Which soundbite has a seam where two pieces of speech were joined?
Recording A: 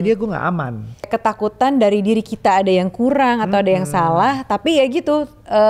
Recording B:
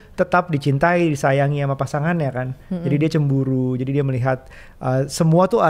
A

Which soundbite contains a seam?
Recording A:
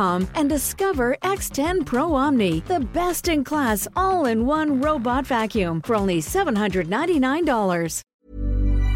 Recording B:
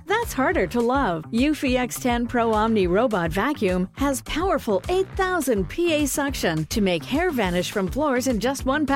A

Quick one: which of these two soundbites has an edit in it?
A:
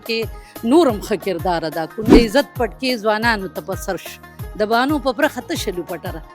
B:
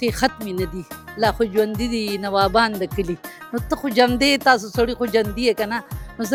A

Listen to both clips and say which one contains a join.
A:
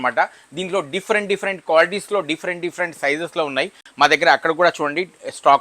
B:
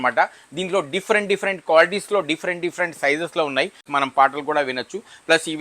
B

